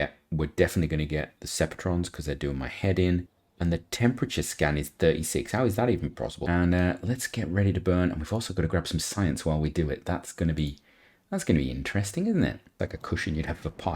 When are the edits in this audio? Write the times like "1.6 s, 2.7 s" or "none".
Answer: 3.3 s, 6.3 s, 12.7 s